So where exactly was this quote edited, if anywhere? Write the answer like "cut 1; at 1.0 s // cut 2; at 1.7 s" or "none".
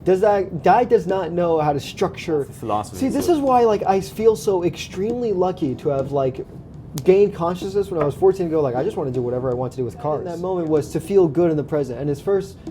cut 1; at 2.6 s // cut 2; at 10.4 s